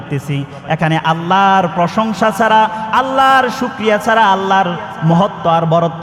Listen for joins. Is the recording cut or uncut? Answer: uncut